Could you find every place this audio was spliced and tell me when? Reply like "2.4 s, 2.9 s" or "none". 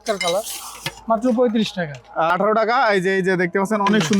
2.3 s